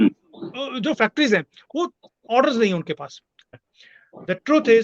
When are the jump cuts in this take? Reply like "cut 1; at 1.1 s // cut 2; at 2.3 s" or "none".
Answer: cut 1; at 3.5 s